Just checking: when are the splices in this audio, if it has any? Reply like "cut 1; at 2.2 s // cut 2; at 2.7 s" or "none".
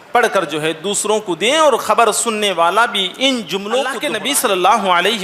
cut 1; at 4.1 s